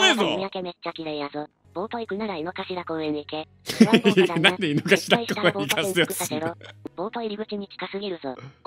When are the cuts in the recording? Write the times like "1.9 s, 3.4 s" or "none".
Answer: 1.6 s, 6.8 s

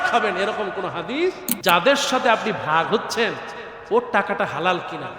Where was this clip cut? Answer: 1.5 s

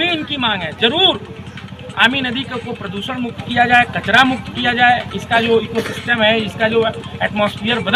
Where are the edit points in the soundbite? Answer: none

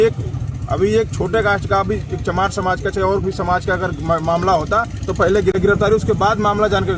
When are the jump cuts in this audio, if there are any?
5.6 s

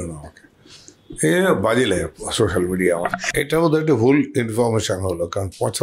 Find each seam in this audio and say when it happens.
3.3 s

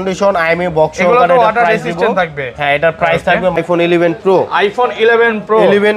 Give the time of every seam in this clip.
3.6 s

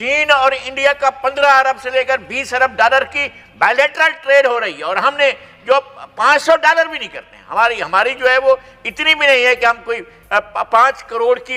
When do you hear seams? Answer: none

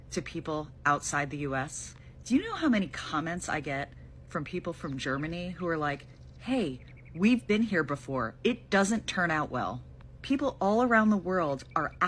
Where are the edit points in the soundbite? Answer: none

